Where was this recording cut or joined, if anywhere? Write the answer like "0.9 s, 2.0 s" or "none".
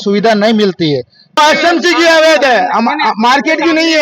1.4 s